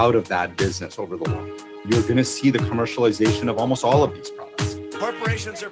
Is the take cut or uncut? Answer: cut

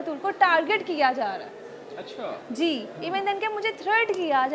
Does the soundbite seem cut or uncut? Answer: uncut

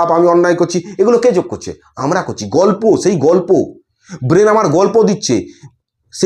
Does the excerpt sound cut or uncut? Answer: uncut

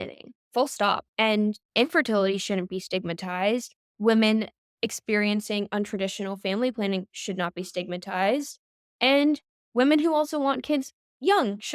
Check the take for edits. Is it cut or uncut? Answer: cut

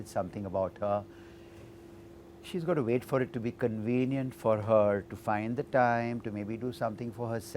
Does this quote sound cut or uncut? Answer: uncut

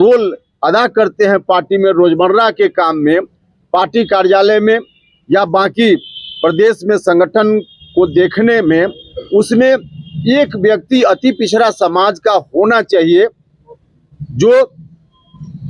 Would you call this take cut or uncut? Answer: uncut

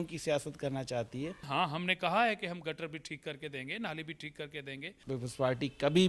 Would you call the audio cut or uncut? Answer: cut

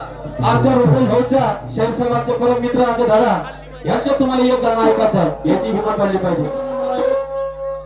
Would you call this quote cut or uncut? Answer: cut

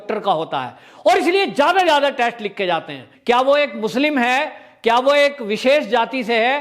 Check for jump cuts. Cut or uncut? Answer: cut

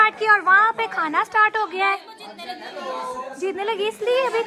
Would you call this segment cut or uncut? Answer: uncut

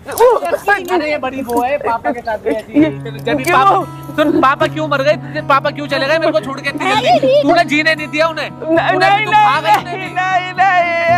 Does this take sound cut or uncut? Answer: uncut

